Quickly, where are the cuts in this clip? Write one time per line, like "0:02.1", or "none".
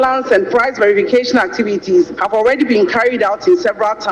none